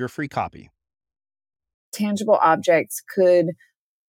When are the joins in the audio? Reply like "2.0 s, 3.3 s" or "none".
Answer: 1.9 s